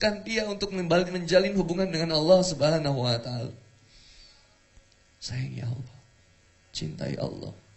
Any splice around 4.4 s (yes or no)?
no